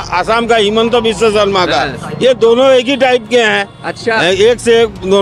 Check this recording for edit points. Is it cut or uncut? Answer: uncut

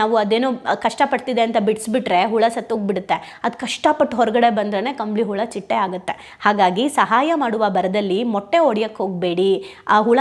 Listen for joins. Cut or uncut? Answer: uncut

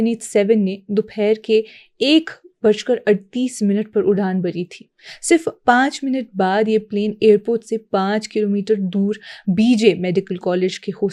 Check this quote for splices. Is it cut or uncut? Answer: uncut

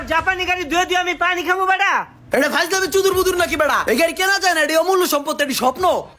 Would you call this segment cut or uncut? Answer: uncut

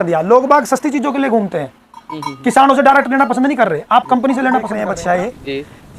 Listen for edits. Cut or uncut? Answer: cut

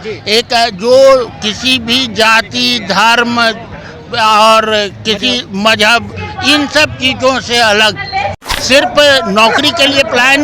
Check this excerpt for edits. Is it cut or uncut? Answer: cut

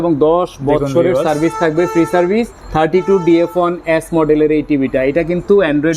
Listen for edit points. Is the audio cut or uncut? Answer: uncut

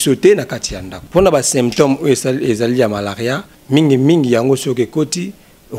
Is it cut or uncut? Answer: uncut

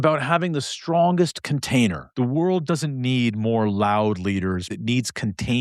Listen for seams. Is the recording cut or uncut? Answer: cut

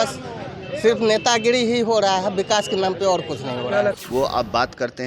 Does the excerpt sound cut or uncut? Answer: cut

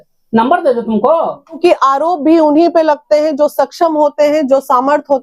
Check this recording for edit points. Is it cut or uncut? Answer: cut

